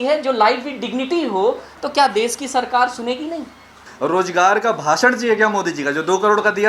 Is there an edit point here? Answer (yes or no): yes